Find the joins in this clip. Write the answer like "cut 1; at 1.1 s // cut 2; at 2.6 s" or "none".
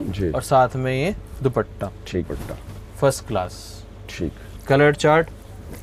cut 1; at 2.2 s